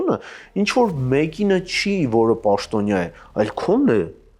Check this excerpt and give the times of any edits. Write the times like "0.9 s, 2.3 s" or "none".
none